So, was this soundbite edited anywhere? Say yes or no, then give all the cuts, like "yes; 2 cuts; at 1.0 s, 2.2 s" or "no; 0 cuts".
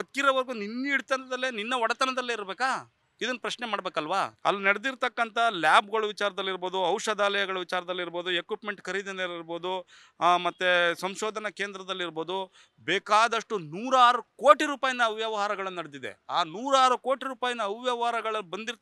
yes; 2 cuts; at 3.0 s, 4.3 s